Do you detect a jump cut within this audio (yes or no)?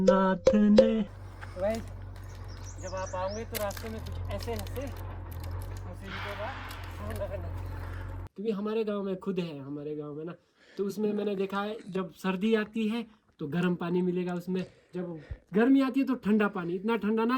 yes